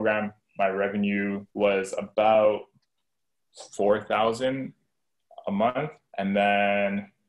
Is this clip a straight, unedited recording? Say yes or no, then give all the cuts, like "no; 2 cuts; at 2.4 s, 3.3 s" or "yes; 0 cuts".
no; 1 cut; at 1.4 s